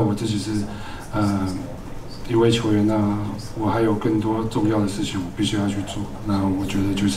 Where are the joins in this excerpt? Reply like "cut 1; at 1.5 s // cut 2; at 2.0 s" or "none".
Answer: cut 1; at 6.1 s